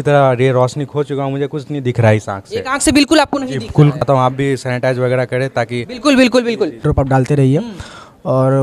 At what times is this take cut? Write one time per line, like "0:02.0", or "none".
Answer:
0:04.0
0:06.8